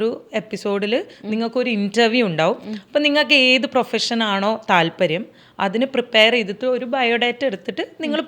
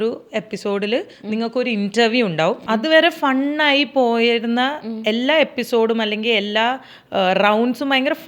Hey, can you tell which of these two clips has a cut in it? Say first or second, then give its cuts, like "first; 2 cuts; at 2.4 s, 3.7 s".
second; 1 cut; at 2.6 s